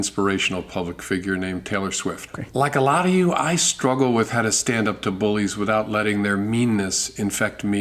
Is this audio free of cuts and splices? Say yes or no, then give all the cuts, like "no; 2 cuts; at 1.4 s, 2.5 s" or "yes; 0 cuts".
no; 1 cut; at 2.2 s